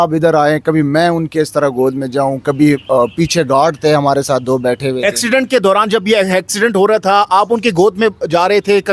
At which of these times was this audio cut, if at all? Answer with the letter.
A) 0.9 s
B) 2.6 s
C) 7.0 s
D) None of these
D